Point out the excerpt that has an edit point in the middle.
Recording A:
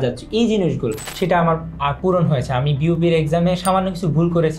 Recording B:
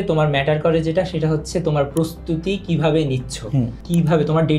A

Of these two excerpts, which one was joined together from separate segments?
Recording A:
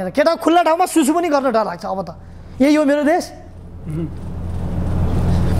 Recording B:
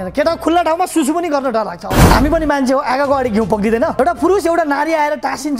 B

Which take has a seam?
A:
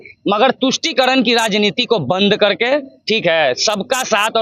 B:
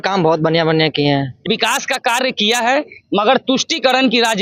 B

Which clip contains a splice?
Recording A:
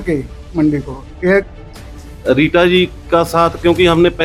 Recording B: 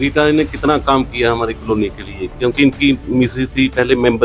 A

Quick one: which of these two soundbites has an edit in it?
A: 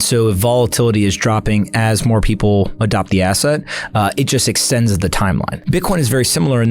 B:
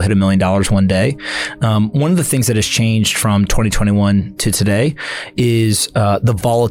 A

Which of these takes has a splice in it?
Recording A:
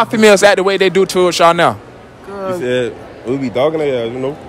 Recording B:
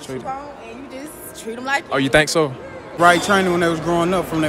B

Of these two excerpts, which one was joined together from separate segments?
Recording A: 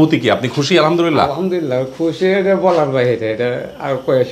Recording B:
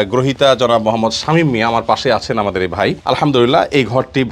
B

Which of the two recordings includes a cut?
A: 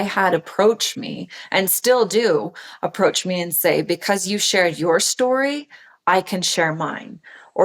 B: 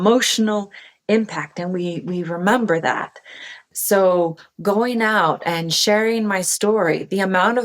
B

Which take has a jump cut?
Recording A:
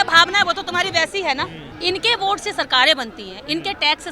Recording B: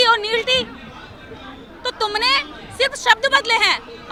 A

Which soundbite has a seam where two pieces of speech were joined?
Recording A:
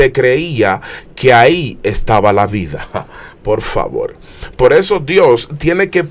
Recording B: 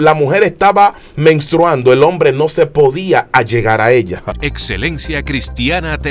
B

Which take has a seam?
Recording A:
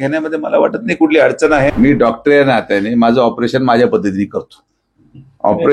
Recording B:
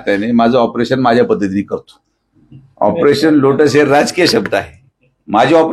A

